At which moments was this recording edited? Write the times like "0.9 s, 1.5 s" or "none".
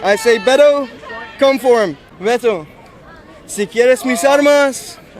2.1 s